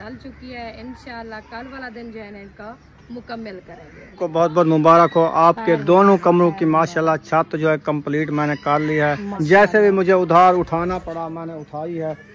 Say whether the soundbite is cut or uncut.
cut